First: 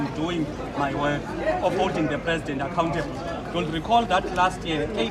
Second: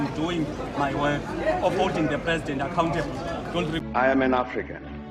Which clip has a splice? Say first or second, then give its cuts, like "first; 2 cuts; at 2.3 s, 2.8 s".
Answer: second; 1 cut; at 3.8 s